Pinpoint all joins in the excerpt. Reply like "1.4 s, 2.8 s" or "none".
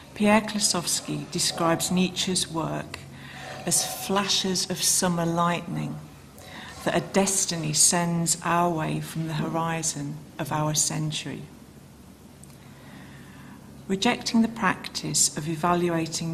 none